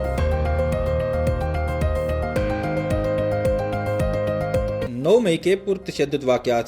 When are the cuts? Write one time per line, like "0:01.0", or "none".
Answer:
0:04.9